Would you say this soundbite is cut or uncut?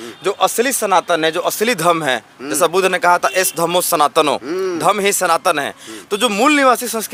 uncut